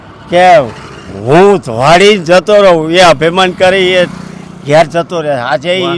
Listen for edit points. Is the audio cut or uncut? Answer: uncut